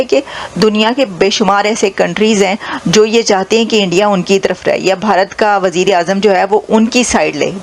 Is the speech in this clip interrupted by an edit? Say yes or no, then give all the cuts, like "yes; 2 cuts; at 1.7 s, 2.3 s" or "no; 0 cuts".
no; 0 cuts